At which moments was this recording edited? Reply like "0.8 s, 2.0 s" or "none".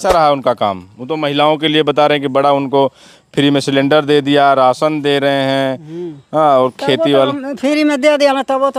none